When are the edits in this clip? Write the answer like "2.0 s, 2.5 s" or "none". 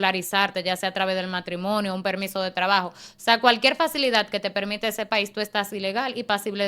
none